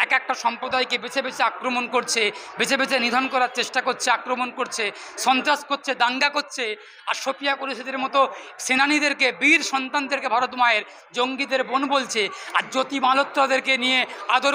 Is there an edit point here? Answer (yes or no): no